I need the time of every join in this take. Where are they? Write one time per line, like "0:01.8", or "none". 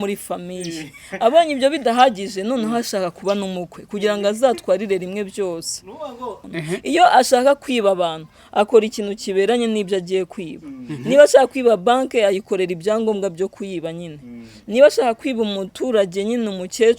0:06.4